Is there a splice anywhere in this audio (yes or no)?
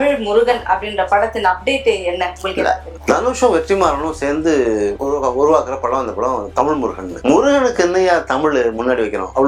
no